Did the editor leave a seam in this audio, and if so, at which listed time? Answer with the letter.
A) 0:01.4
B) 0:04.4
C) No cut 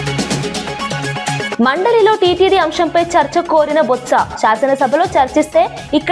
C